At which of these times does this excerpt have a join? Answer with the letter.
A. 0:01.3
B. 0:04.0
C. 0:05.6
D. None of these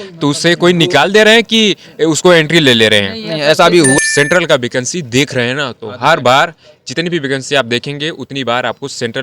B